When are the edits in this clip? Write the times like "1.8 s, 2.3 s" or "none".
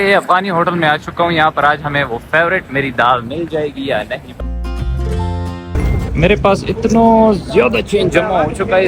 4.3 s